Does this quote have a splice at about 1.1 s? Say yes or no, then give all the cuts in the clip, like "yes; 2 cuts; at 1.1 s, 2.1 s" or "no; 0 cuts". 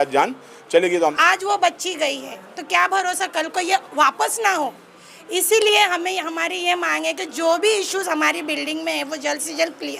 yes; 1 cut; at 1.1 s